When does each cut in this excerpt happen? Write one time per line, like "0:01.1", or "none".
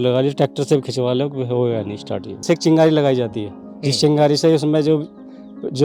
0:02.4